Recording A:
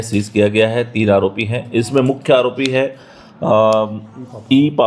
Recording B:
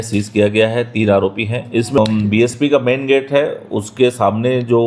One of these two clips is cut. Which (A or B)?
B